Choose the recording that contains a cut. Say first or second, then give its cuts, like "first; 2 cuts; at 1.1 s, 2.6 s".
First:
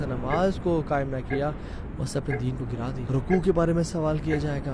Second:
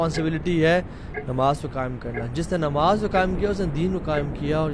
first; 1 cut; at 3.0 s